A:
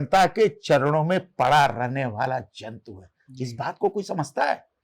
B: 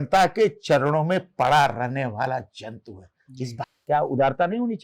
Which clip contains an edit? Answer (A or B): B